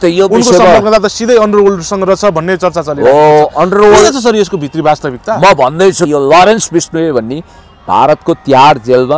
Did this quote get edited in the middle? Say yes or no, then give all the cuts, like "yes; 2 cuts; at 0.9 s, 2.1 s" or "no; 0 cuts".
yes; 1 cut; at 6.1 s